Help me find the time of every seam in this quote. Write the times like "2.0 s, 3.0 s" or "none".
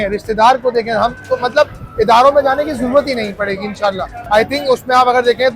4.1 s